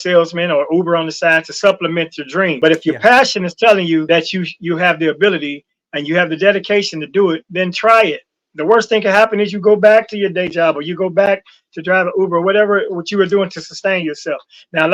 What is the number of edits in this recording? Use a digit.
2